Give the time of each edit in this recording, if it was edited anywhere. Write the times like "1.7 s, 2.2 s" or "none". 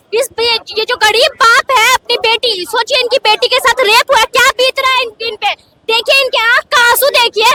none